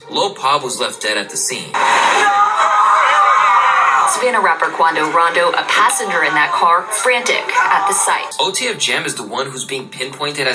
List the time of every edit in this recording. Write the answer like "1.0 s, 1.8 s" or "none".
1.7 s, 8.3 s